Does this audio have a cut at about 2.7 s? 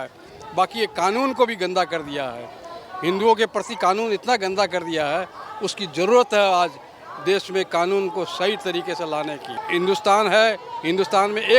no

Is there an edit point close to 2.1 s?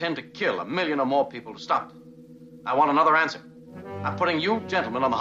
no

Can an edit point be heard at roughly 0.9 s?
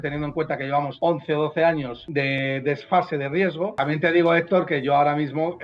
yes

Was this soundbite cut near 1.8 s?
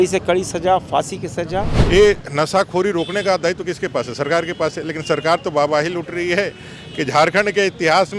yes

